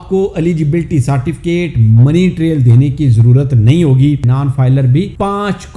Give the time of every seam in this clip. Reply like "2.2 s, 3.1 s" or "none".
4.3 s